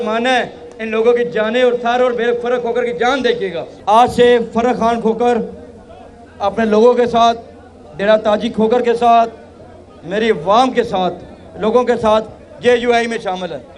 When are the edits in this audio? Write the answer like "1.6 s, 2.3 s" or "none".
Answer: 3.7 s